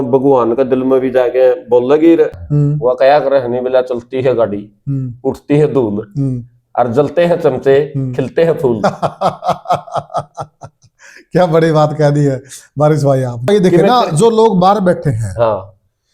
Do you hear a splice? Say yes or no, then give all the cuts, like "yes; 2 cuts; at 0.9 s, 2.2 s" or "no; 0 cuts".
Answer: yes; 2 cuts; at 2.5 s, 13.5 s